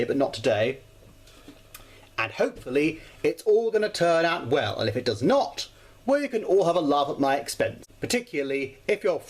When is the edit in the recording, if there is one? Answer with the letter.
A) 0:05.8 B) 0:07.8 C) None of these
B